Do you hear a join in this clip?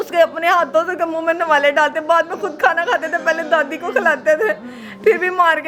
no; 0 cuts

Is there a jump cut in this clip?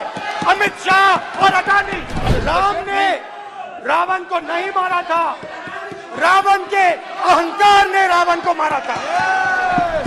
yes; 1 cut; at 2.3 s

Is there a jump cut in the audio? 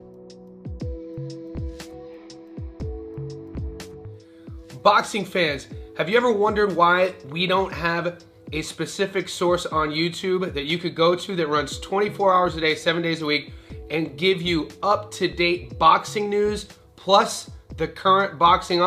yes; 2 cuts; at 1.9 s, 4.2 s

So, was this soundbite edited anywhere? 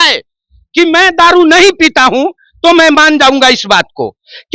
no; 0 cuts

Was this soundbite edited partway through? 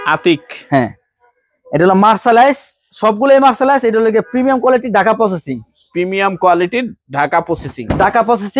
no; 0 cuts

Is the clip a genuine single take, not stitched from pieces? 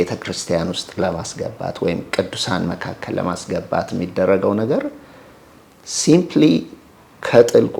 yes; 0 cuts

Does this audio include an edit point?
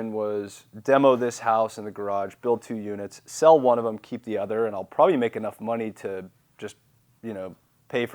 no; 0 cuts

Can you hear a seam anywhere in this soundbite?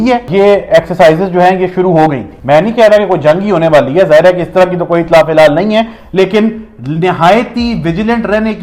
no; 0 cuts

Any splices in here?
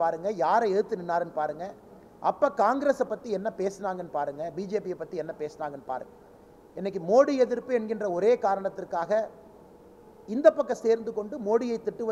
no; 0 cuts

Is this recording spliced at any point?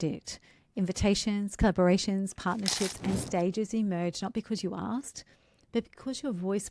no; 0 cuts

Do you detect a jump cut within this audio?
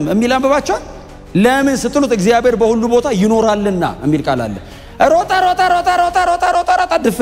no; 0 cuts

